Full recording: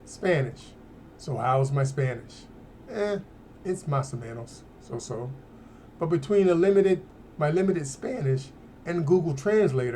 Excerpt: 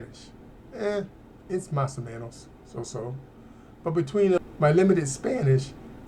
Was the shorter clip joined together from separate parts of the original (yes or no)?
yes